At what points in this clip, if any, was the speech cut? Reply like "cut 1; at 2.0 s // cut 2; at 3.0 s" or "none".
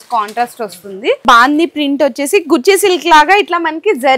cut 1; at 1.2 s